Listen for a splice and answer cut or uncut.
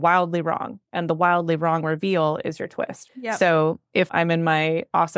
cut